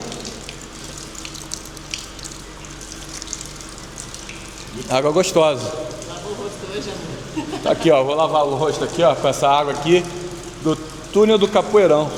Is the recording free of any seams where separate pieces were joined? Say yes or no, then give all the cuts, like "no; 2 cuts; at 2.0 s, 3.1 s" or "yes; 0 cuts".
yes; 0 cuts